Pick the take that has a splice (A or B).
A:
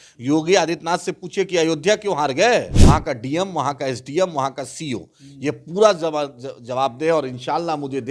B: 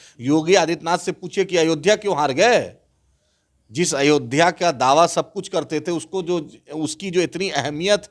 A